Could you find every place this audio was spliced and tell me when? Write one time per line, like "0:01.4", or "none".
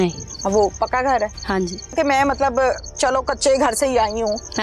0:01.9